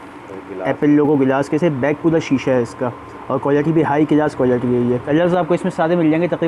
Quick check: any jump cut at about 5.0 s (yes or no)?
yes